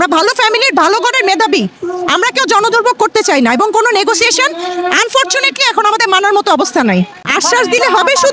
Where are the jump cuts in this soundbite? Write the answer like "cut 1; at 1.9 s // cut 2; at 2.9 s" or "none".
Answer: cut 1; at 7.2 s